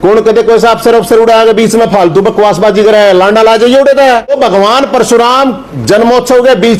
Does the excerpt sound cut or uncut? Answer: cut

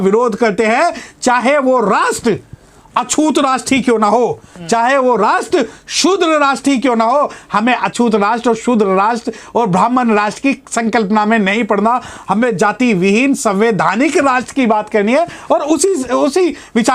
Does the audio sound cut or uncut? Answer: uncut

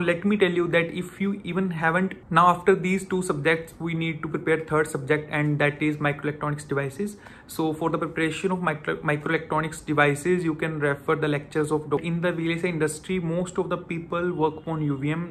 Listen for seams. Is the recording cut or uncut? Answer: cut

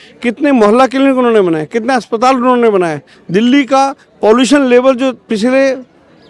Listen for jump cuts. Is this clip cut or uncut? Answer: uncut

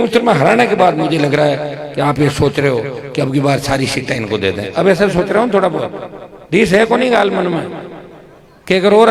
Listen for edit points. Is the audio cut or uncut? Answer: uncut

